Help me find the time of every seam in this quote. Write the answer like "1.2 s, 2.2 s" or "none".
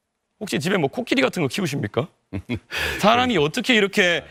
none